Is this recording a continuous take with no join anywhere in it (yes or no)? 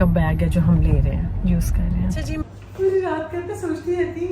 no